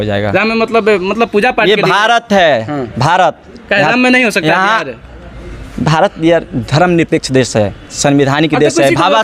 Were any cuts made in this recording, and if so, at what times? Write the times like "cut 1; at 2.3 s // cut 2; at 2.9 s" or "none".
none